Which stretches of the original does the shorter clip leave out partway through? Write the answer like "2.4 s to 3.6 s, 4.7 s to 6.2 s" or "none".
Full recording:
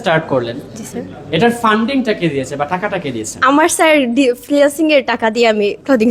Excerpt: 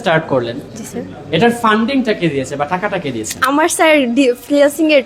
none

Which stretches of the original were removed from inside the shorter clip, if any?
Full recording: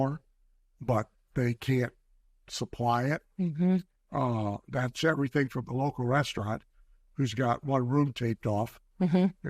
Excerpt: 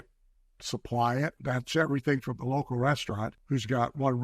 3.3 s to 4.7 s, 6.6 s to 7.0 s

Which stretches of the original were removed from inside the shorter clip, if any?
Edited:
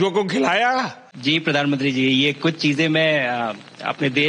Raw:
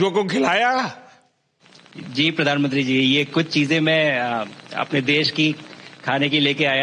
1.0 s to 2.0 s

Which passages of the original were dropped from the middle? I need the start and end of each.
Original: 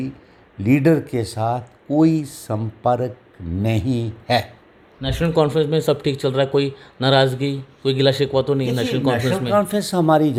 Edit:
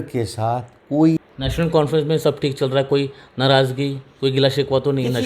2.3 s to 4.9 s

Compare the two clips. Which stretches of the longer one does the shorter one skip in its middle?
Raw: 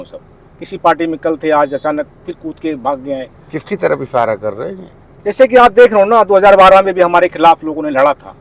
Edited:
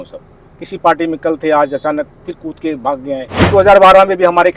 3.5 s to 6.3 s

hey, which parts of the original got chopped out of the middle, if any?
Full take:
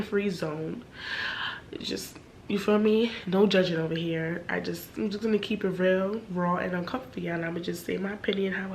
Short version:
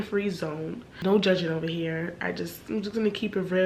0.9 s to 3.2 s

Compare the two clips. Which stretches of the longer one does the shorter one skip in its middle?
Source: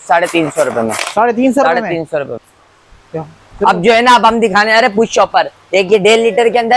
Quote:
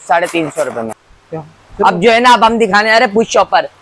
1.0 s to 2.8 s

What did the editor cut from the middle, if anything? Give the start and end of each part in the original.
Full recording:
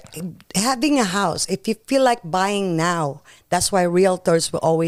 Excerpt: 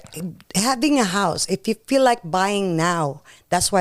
none

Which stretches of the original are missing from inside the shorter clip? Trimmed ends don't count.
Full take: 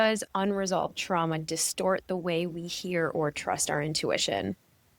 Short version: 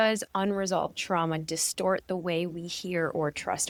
none

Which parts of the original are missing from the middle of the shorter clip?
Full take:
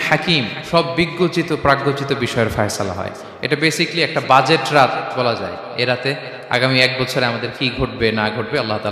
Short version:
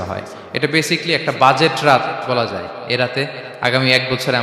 none

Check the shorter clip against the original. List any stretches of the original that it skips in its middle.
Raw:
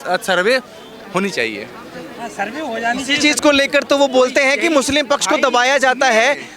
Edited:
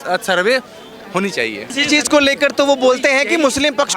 1.7 s to 3.0 s

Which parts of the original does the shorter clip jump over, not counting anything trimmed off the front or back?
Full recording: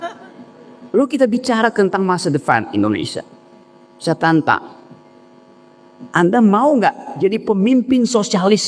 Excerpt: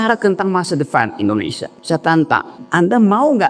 3.2 s to 3.8 s, 4.7 s to 6.0 s

